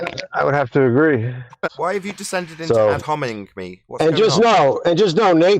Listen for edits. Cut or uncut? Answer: cut